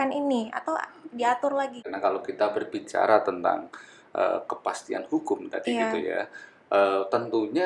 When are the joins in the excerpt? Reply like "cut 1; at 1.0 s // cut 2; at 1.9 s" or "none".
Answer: cut 1; at 1.9 s